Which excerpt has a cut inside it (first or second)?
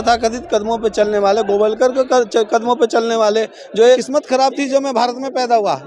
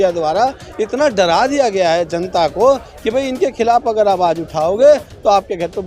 first